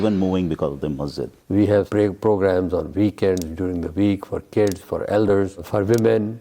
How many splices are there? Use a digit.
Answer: 1